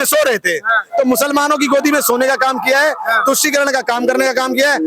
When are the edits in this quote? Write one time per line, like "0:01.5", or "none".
none